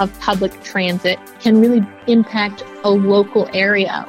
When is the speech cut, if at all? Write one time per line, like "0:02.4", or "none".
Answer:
0:01.3
0:02.0